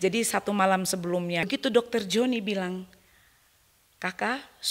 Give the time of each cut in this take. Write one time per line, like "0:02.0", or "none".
0:01.5